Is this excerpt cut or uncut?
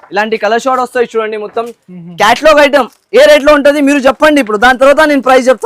uncut